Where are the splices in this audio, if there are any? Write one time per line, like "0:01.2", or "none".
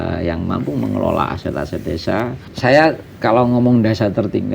0:02.4